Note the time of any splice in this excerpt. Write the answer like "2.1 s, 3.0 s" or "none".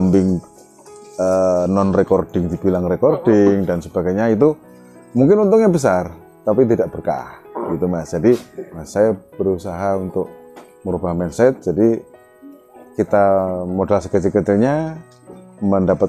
8.8 s